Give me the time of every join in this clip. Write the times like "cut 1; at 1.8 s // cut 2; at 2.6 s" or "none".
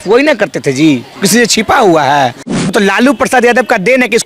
cut 1; at 2.6 s